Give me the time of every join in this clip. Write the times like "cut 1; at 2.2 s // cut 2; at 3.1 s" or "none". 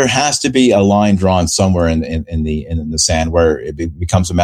none